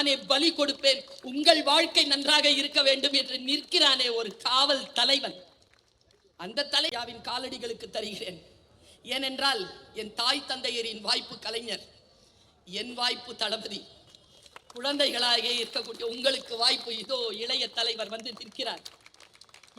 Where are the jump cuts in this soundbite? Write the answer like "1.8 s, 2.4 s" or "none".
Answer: 6.9 s